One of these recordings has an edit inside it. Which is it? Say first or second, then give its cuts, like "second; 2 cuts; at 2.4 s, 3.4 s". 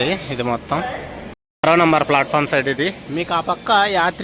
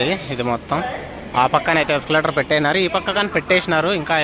first; 1 cut; at 1.2 s